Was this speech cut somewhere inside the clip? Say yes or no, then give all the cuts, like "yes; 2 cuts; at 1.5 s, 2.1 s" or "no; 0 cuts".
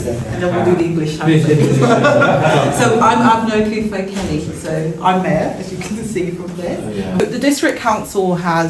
yes; 1 cut; at 7.2 s